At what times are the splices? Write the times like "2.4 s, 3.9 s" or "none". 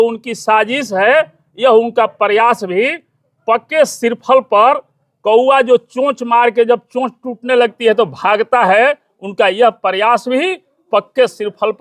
none

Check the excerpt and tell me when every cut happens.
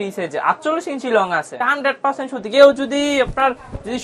1.6 s

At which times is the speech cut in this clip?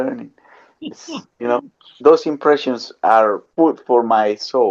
1.9 s, 3.4 s

